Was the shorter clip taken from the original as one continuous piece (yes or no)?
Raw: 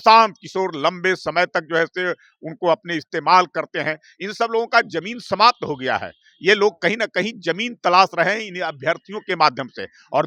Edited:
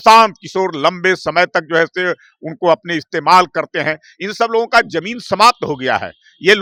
yes